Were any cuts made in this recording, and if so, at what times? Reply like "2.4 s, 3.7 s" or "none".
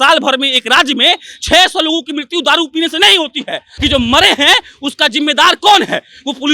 3.7 s